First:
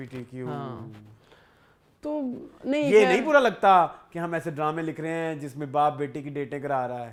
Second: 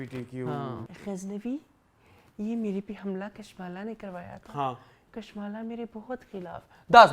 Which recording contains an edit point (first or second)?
second